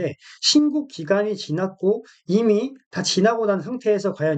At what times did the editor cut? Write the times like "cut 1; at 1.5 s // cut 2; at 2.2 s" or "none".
none